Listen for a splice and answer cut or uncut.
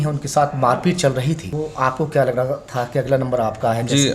cut